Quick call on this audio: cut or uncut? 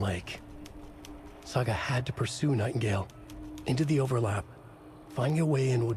uncut